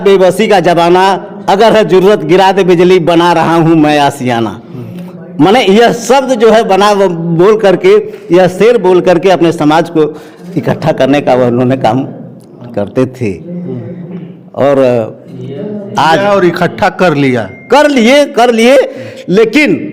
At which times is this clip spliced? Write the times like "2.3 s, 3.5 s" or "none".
none